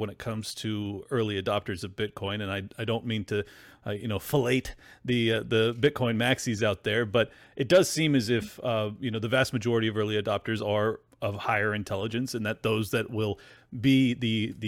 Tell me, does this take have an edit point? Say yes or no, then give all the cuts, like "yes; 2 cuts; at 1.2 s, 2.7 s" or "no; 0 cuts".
no; 0 cuts